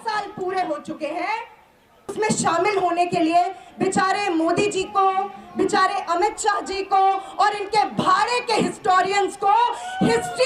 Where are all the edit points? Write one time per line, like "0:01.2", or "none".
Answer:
0:02.1